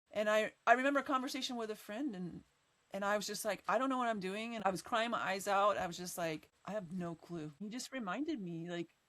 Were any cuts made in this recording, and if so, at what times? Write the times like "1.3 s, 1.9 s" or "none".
4.6 s, 6.5 s, 7.6 s